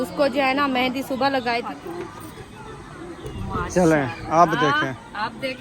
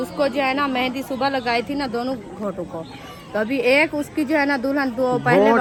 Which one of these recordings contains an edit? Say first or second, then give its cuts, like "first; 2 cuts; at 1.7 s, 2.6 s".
first; 1 cut; at 1.6 s